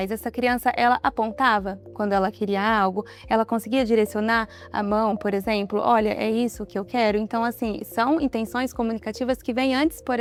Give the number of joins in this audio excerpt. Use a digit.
0